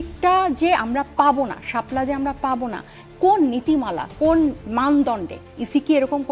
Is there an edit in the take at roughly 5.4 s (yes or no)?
no